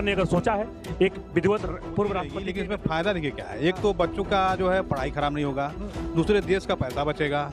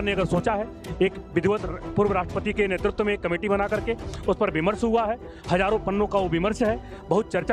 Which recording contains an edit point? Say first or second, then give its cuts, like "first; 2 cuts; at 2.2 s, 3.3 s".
first; 1 cut; at 2.4 s